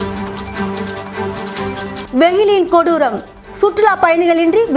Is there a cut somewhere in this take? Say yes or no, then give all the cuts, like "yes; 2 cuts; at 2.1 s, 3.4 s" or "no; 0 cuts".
yes; 1 cut; at 1.5 s